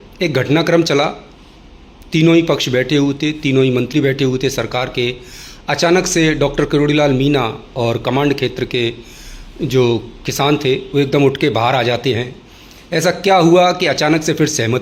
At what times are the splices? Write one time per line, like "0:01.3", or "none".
none